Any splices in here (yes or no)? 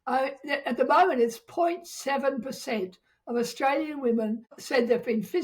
yes